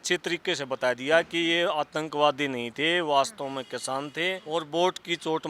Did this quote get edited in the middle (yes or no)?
yes